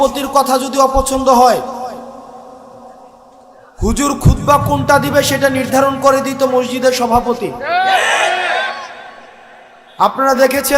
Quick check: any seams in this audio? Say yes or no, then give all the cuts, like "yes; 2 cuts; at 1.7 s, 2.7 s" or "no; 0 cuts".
no; 0 cuts